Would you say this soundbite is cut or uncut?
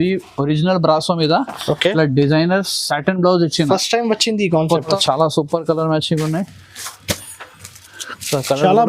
cut